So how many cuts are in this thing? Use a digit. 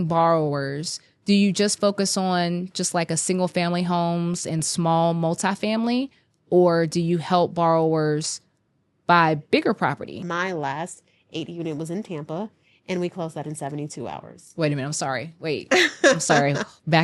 1